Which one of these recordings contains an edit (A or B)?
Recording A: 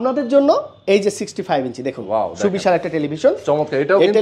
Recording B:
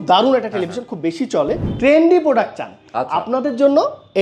B